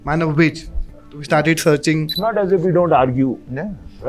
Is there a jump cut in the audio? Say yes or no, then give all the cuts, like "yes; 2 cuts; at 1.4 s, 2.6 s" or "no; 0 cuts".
yes; 1 cut; at 2.1 s